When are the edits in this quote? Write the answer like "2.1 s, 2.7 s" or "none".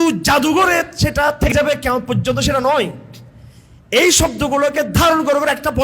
1.5 s